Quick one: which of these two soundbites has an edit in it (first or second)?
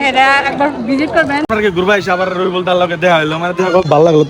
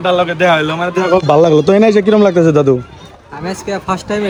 first